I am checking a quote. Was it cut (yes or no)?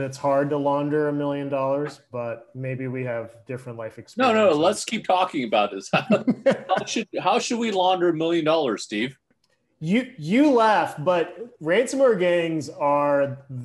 yes